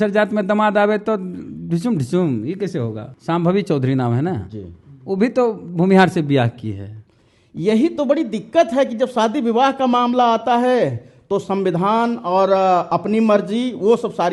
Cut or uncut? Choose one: cut